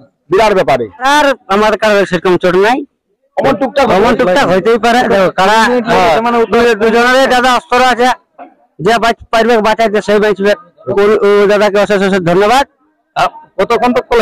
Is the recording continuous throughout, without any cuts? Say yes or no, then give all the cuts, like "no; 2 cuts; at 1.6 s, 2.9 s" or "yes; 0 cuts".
no; 2 cuts; at 1.0 s, 10.8 s